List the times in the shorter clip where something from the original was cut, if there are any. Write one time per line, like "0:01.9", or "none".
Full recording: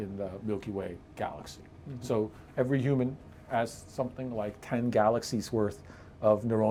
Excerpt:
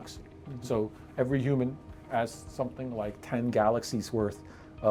none